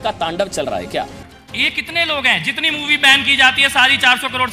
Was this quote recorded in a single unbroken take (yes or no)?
no